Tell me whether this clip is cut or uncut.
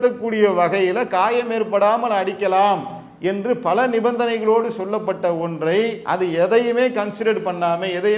cut